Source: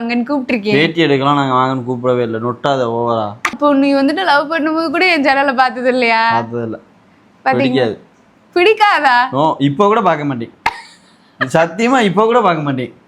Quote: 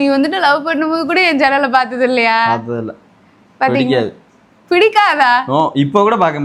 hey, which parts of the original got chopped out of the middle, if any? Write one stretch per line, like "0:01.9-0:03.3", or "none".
none